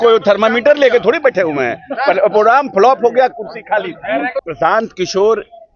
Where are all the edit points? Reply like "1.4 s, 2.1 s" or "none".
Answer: 4.4 s